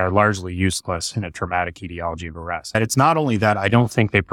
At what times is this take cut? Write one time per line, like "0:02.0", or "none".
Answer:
0:02.8

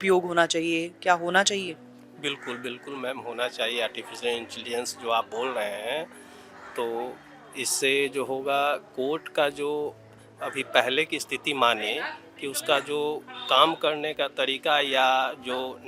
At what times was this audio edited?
none

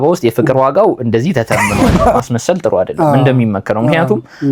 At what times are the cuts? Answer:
0:02.2

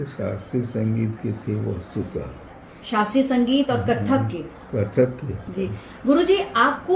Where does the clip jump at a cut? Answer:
0:05.5

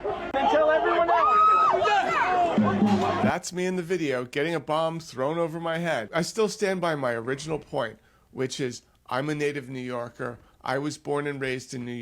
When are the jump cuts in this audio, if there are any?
0:06.1

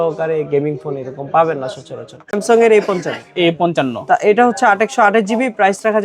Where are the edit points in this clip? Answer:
0:02.3

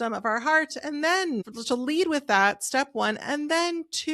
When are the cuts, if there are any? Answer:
0:03.2

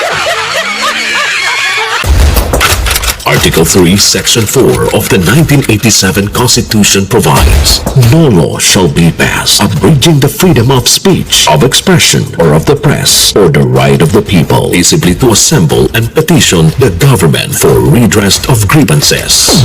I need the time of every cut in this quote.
0:02.0

